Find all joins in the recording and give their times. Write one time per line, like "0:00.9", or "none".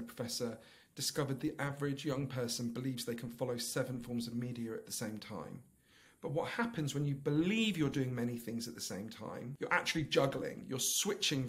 0:09.5